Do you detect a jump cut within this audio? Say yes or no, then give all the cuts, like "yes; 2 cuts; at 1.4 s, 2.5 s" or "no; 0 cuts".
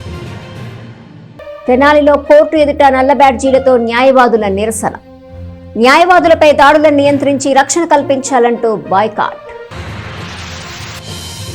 no; 0 cuts